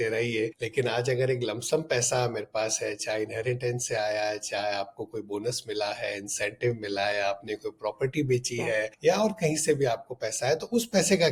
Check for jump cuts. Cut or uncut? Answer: uncut